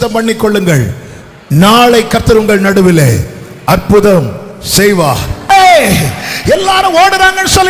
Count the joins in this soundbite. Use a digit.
1